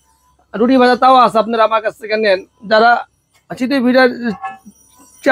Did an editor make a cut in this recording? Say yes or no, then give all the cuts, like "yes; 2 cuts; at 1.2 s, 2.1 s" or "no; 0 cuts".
no; 0 cuts